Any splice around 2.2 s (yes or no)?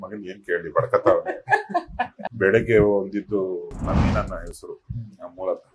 yes